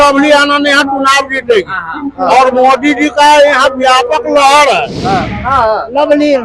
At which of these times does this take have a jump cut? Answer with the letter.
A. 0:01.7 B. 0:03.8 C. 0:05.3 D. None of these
C